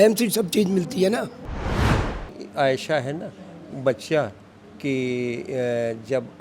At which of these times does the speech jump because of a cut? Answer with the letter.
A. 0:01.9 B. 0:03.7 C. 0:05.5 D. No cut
A